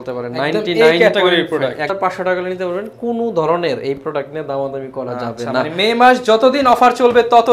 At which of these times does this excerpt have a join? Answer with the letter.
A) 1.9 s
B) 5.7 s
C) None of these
A